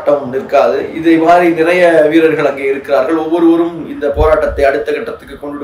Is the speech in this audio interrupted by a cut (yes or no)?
no